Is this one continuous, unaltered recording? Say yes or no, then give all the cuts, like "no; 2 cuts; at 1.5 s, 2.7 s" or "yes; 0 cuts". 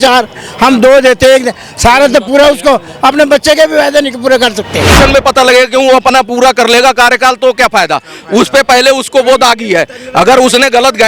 no; 1 cut; at 4.9 s